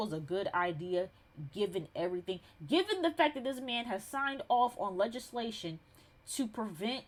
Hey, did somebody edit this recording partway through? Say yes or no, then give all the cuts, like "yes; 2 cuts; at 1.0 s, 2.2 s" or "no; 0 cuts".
no; 0 cuts